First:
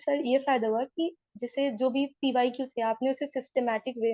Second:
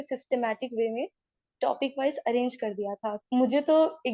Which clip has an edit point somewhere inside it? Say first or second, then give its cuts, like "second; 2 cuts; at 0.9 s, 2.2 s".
second; 1 cut; at 3.2 s